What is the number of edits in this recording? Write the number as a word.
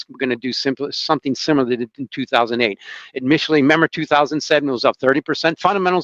zero